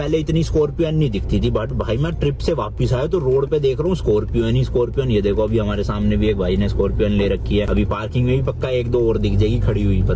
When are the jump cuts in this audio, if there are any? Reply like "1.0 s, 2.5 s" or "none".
none